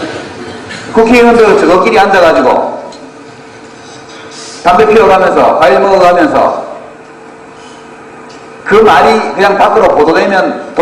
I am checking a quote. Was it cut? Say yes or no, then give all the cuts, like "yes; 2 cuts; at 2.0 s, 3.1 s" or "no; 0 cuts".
yes; 1 cut; at 8.9 s